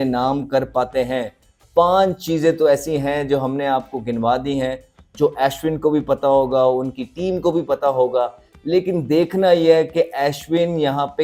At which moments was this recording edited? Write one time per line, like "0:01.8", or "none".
none

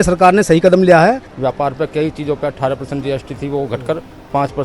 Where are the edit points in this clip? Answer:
0:01.3

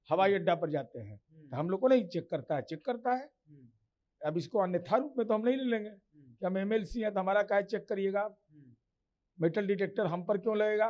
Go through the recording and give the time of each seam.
none

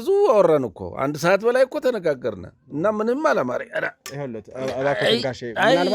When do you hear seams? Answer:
none

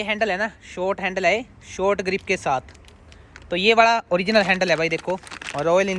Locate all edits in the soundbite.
none

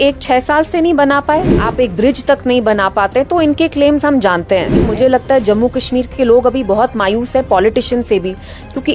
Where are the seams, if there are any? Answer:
0:01.6
0:04.8

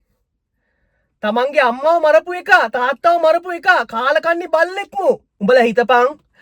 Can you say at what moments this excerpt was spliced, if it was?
0:05.3

